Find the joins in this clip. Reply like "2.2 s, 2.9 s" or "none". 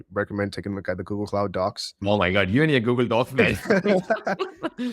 1.9 s